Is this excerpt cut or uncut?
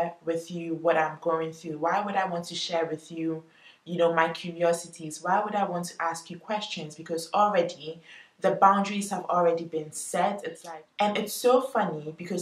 cut